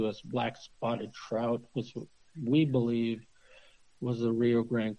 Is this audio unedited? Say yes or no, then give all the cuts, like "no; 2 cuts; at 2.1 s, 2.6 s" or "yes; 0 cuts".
yes; 0 cuts